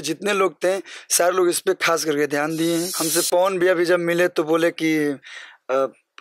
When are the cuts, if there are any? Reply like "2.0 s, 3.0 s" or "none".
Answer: 3.0 s